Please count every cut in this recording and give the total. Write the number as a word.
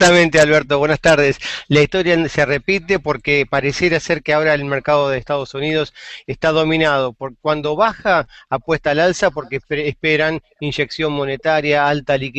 zero